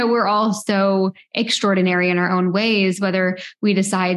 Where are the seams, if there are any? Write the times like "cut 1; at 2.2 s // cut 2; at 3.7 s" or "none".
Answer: none

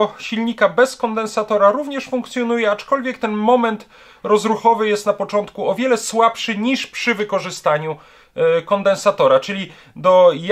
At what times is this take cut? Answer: none

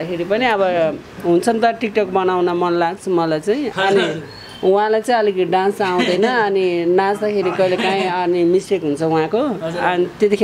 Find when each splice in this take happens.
none

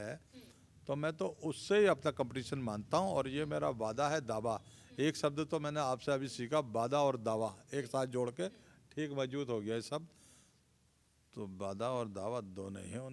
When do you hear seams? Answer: none

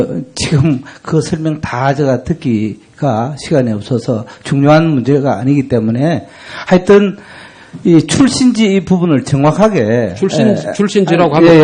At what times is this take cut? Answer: cut 1; at 4.8 s

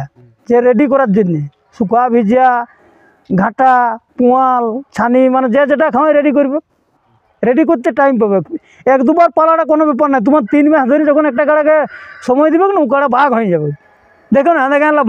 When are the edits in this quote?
none

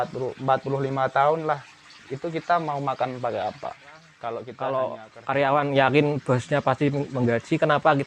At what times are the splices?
cut 1; at 4.1 s

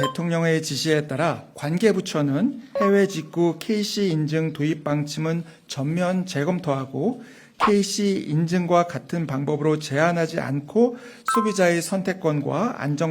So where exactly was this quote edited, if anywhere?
cut 1; at 1.5 s // cut 2; at 2.7 s

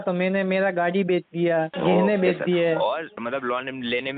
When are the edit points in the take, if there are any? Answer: cut 1; at 1.7 s // cut 2; at 3.2 s

